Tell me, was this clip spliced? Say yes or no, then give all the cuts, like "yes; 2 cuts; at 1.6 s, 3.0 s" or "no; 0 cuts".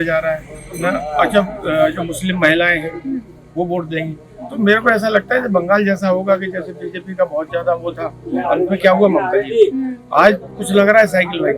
no; 0 cuts